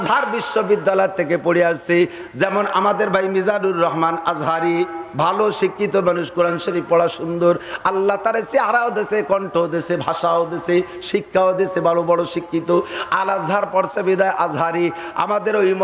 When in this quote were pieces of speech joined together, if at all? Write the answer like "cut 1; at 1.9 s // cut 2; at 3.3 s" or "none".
none